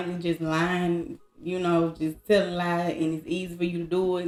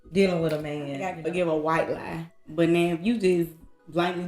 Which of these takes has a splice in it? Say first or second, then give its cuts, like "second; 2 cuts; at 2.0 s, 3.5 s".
second; 1 cut; at 1.1 s